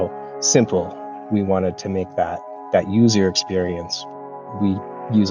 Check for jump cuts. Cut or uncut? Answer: cut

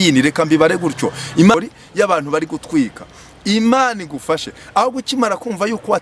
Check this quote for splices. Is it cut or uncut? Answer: cut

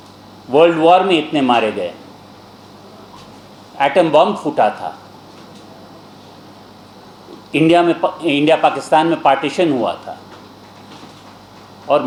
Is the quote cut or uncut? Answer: uncut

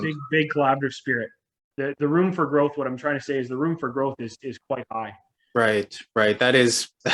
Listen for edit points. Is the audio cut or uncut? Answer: cut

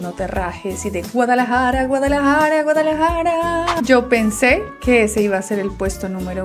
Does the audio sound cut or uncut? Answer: cut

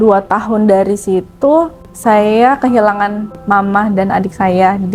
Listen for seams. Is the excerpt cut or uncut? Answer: uncut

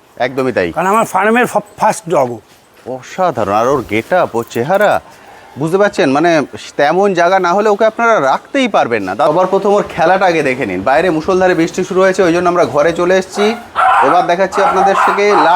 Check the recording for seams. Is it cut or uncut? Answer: cut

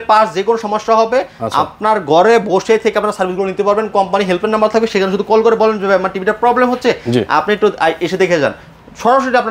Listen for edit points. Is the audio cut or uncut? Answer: uncut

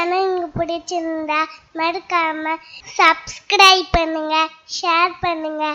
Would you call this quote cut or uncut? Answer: uncut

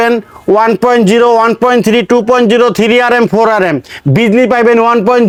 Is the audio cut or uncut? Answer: uncut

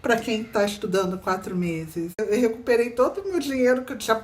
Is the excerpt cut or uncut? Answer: cut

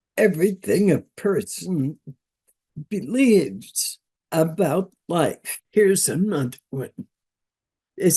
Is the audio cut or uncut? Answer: uncut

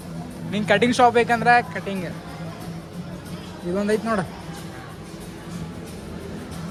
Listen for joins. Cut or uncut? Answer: uncut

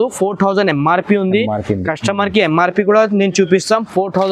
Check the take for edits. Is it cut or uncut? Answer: uncut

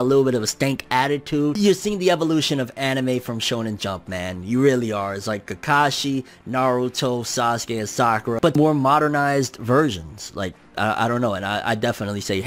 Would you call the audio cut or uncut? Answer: cut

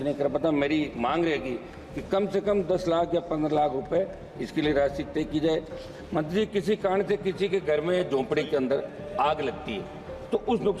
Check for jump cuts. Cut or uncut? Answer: uncut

